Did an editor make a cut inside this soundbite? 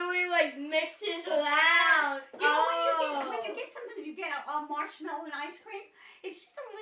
no; 0 cuts

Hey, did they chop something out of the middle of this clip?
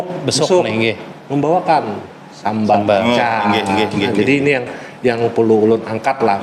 no; 0 cuts

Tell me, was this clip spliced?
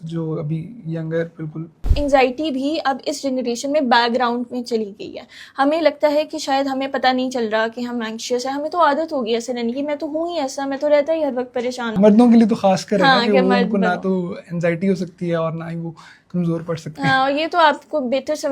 yes; 2 cuts; at 1.9 s, 11.9 s

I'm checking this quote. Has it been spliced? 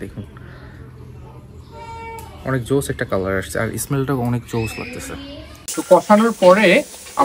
yes; 1 cut; at 5.6 s

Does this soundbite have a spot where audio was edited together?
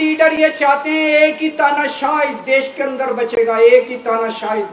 no; 0 cuts

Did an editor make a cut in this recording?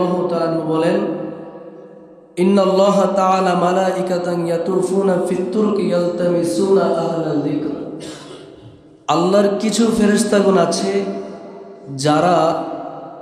no; 0 cuts

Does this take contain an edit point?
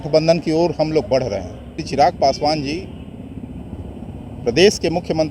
yes; 1 cut; at 1.8 s

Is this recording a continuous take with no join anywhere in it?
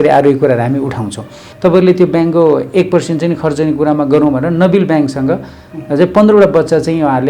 no; 1 cut; at 1.4 s

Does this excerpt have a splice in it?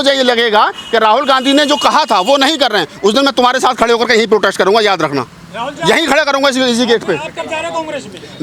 no; 0 cuts

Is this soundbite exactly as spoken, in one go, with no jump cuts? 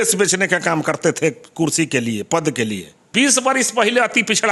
no; 1 cut; at 3.0 s

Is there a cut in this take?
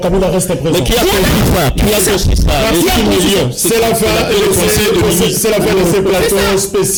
no; 0 cuts

